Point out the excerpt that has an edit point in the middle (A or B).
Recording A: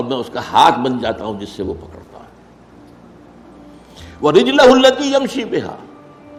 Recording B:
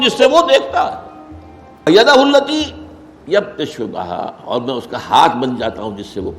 B